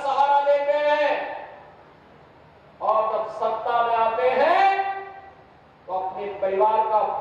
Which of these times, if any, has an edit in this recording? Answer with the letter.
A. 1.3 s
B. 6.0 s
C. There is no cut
C